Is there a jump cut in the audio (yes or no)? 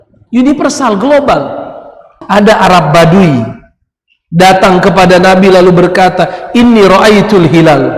yes